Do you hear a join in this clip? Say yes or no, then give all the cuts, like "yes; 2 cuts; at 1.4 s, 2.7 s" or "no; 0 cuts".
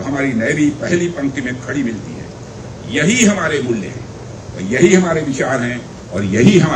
no; 0 cuts